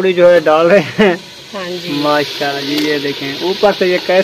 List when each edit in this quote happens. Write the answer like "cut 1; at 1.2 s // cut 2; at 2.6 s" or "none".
cut 1; at 2.6 s